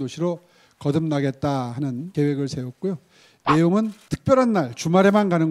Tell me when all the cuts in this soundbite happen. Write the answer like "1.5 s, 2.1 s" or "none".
2.0 s, 4.1 s